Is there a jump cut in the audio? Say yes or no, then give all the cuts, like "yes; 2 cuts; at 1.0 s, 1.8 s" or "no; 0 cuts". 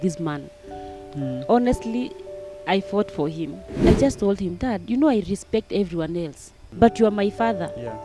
yes; 2 cuts; at 3.7 s, 6.6 s